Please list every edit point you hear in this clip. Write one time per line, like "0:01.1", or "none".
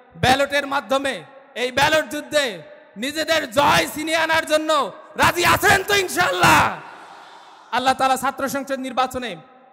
none